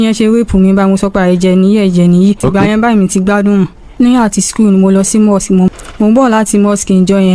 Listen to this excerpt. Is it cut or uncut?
cut